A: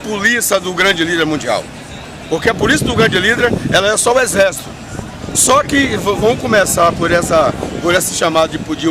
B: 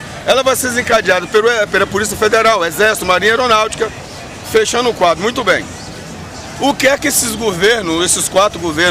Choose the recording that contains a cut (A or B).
A